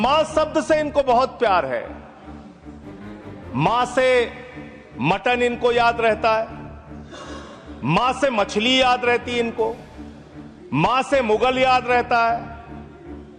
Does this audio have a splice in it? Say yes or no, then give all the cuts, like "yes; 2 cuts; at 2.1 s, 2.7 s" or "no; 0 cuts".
no; 0 cuts